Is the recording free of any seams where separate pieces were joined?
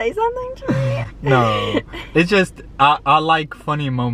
yes; 0 cuts

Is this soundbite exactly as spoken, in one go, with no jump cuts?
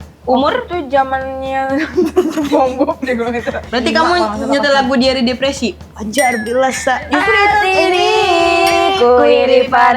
no; 1 cut; at 3.6 s

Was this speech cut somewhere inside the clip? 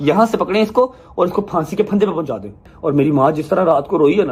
yes; 1 cut; at 2.7 s

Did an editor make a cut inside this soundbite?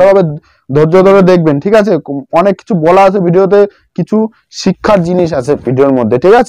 no; 0 cuts

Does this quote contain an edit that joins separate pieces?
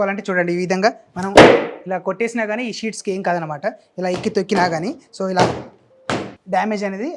no; 0 cuts

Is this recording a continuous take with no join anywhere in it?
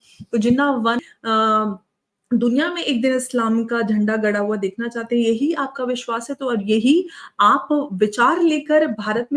no; 1 cut; at 1.0 s

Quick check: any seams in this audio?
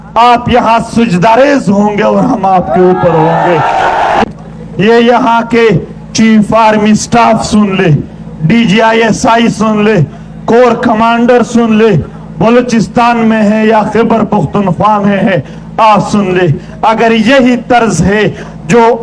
yes; 1 cut; at 4.2 s

